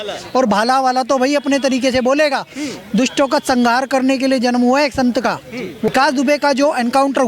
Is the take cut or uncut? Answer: cut